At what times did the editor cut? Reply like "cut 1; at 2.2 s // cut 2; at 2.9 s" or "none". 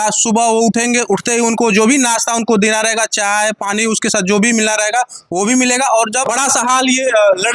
cut 1; at 6.3 s